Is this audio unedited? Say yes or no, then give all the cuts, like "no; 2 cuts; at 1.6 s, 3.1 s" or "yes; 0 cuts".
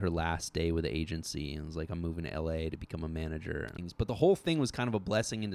no; 1 cut; at 3.8 s